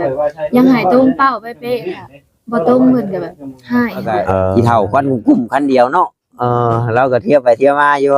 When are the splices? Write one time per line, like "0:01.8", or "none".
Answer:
0:04.5